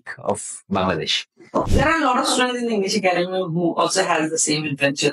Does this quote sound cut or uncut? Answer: cut